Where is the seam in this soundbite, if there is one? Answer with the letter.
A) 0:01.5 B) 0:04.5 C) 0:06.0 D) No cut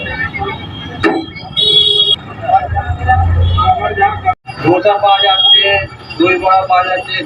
B